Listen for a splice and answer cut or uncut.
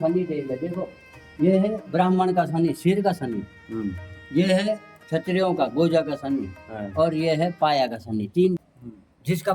cut